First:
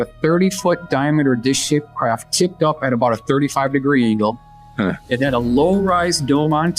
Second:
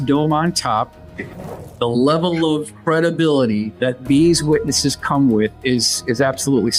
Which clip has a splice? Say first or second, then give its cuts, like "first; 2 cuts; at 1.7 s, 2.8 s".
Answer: second; 3 cuts; at 1.5 s, 2.7 s, 3.7 s